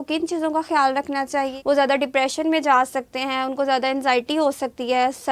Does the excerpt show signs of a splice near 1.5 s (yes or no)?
yes